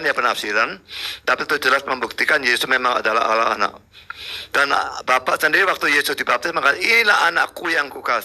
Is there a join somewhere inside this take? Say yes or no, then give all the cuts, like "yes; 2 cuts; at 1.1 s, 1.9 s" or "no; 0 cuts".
no; 0 cuts